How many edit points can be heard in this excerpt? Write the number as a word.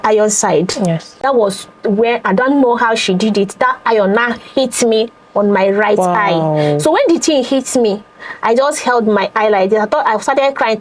one